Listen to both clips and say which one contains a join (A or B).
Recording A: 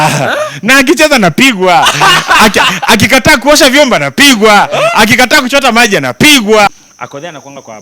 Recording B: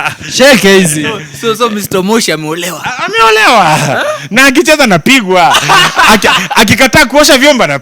A